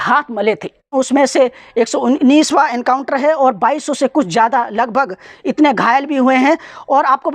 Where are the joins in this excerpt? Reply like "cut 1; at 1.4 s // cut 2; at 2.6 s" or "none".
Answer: cut 1; at 0.9 s